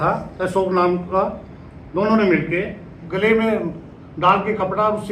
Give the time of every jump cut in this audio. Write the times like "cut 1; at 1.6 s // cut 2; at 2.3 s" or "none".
cut 1; at 3.0 s